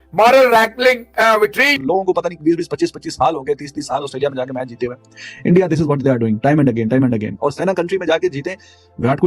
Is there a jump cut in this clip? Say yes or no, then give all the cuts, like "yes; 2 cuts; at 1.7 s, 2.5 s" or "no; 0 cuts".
yes; 1 cut; at 1.8 s